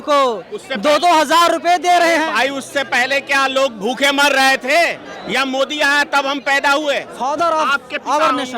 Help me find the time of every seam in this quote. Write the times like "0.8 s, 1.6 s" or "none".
5.1 s, 7.1 s